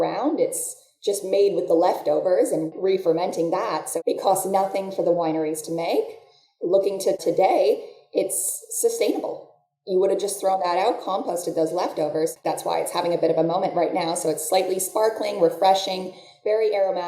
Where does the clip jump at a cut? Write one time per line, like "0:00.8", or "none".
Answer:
0:07.2
0:12.4